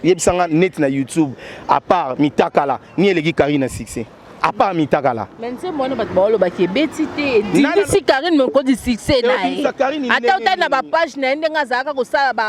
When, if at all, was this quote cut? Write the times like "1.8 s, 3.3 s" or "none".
none